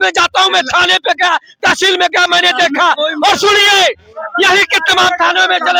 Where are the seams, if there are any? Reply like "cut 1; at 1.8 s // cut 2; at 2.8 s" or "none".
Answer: none